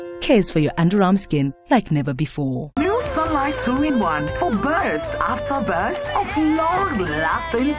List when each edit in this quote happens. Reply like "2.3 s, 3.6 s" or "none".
2.8 s